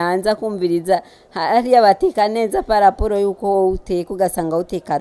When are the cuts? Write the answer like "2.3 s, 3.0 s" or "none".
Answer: none